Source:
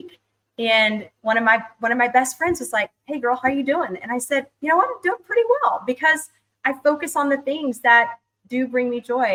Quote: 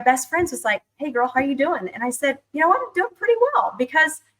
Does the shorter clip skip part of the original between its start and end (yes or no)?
no